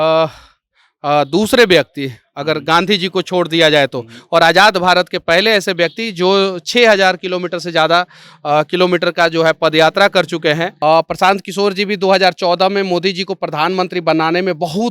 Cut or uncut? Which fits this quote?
cut